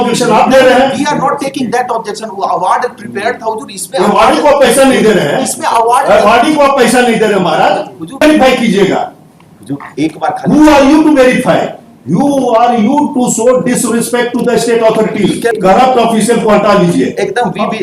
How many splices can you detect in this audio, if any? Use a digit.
2